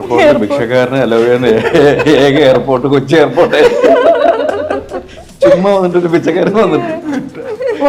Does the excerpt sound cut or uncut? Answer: uncut